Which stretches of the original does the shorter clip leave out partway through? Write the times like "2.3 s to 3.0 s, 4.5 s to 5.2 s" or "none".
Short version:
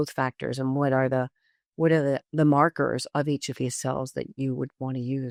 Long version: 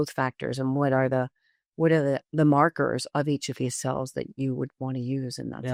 none